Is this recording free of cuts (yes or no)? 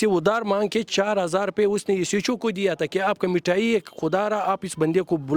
yes